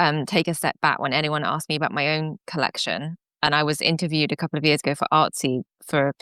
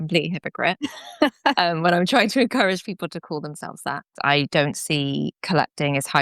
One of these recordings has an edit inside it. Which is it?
second; 1 cut; at 4.1 s

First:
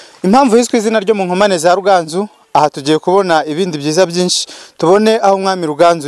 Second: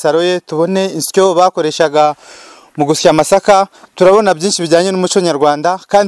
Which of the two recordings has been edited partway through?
second; 1 cut; at 2.0 s

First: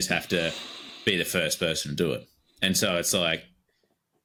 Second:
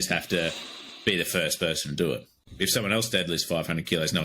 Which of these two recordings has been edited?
second; 1 cut; at 2.4 s

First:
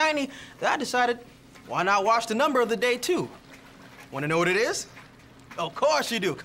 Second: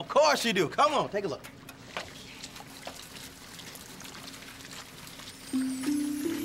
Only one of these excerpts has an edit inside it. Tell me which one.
second; 2 cuts; at 2.1 s, 5.5 s

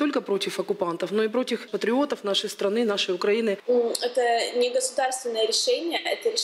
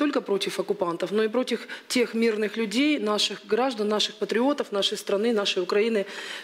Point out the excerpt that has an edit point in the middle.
first; 2 cuts; at 1.7 s, 3.6 s

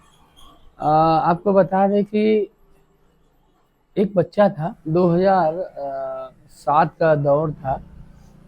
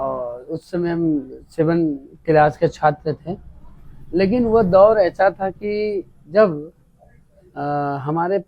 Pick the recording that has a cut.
first; 1 cut; at 4.7 s

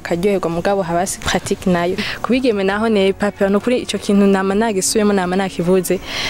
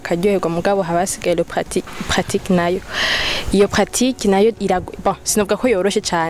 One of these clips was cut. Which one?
first; 2 cuts; at 1.1 s, 2.1 s

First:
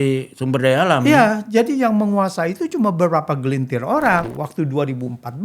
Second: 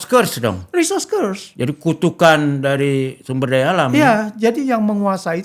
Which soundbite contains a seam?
first; 1 cut; at 4.3 s

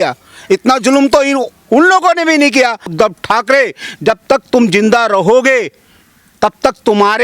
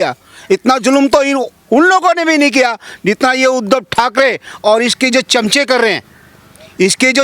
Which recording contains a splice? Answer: first; 1 cut; at 2.9 s

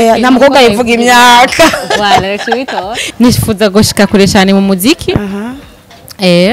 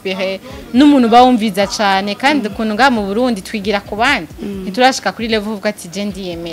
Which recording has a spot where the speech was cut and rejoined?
first; 1 cut; at 3.0 s

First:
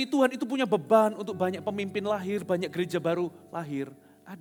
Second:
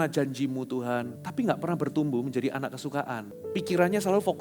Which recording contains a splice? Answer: second; 2 cuts; at 1.2 s, 3.3 s

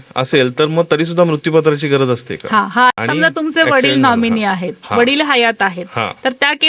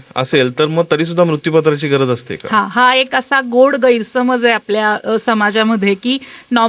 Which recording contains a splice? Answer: first; 1 cut; at 2.9 s

